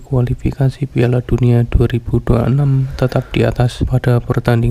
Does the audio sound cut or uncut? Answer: cut